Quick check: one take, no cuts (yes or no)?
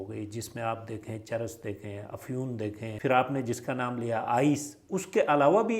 no